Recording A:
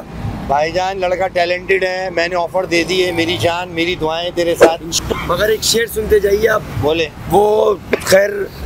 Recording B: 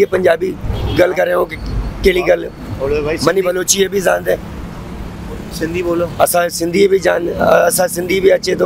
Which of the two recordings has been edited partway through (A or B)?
A